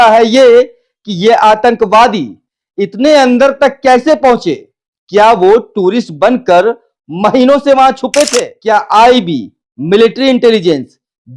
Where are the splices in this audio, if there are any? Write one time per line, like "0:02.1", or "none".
0:08.5

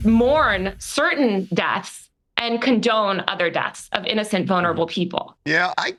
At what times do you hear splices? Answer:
none

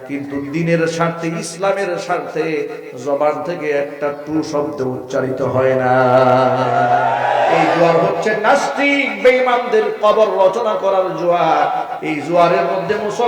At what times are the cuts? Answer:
0:07.1

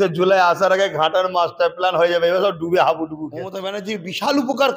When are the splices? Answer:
0:03.7

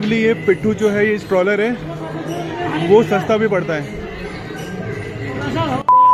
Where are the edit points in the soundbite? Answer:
none

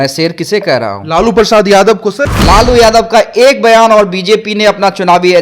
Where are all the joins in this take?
0:02.3

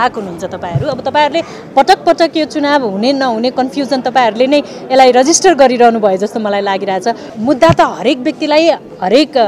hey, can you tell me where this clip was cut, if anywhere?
0:07.3

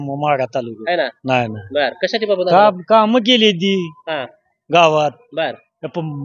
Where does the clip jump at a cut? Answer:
none

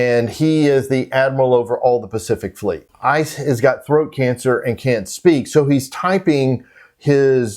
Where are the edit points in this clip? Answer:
0:02.9

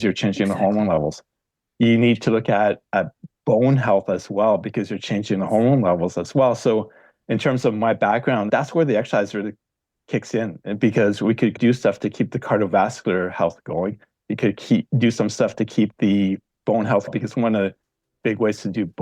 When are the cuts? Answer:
0:08.5
0:11.6
0:17.1

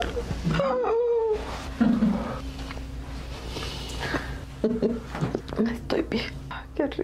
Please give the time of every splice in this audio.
none

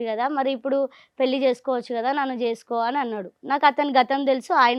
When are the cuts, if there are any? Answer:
none

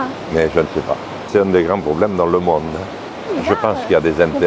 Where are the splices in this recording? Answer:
0:01.3
0:03.2

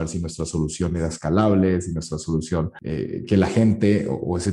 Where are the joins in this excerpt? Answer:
0:02.8

